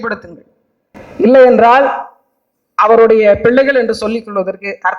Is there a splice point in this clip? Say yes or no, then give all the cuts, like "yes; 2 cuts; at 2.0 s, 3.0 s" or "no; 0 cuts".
no; 0 cuts